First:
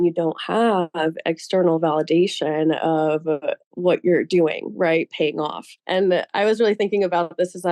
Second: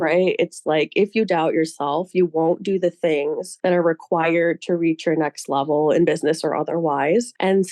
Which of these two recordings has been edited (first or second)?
first